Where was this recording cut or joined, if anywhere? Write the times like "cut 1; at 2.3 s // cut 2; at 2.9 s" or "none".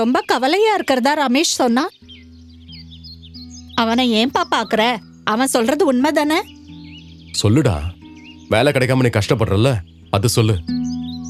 none